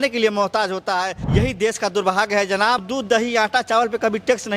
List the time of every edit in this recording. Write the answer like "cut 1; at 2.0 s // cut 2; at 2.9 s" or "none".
cut 1; at 1.2 s // cut 2; at 2.9 s